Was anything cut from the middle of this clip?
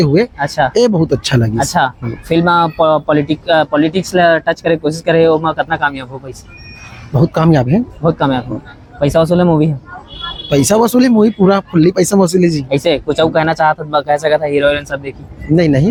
no; 0 cuts

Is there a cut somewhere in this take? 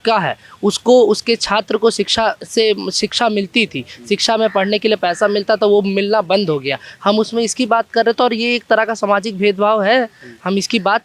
no; 0 cuts

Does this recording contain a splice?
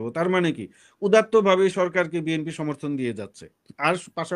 no; 0 cuts

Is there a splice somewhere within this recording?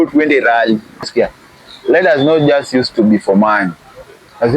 yes; 1 cut; at 1.1 s

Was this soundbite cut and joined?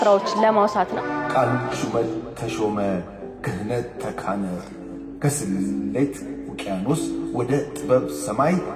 yes; 1 cut; at 1.0 s

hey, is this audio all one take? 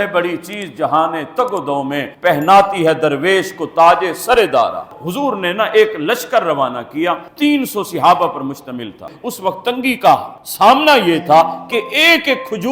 no; 2 cuts; at 4.9 s, 9.0 s

